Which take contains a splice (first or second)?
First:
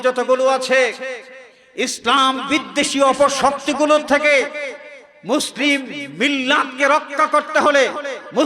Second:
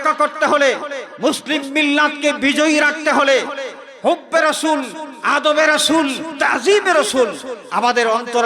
second